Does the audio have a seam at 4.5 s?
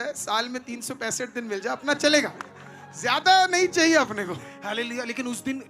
yes; 1 cut; at 4.5 s

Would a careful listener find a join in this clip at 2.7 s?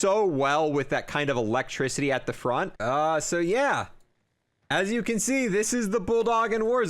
yes; 1 cut; at 2.7 s

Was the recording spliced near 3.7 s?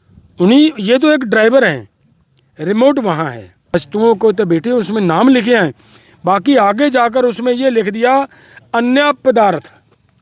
yes; 1 cut; at 3.7 s

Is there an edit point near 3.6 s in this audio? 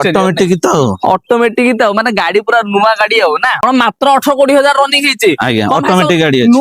yes; 1 cut; at 3.6 s

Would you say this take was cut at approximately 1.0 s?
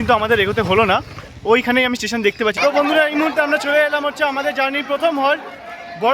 no; 1 cut; at 2.6 s

